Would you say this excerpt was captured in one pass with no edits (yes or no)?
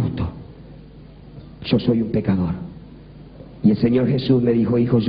no